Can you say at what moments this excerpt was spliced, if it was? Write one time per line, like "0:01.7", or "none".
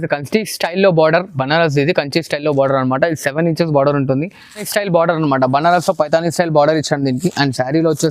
0:04.6